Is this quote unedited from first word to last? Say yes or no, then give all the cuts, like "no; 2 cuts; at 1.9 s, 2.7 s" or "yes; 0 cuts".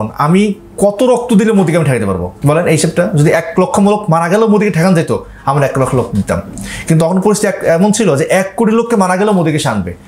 no; 1 cut; at 2.3 s